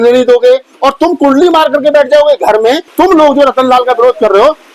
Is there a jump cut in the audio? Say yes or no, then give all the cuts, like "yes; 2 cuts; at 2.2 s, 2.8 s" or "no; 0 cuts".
yes; 1 cut; at 2.9 s